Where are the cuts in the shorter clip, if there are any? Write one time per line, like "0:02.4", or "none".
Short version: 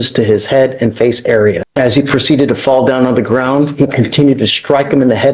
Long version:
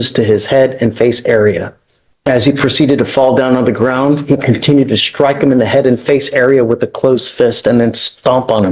0:01.6